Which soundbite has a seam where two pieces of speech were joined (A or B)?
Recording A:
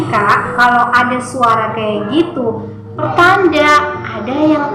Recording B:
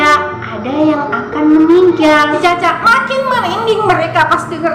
B